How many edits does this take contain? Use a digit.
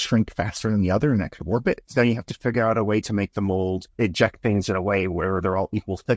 2